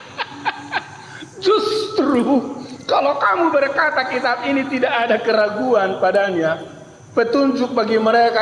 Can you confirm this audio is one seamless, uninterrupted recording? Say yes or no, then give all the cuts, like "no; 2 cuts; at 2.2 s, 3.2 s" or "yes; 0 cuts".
yes; 0 cuts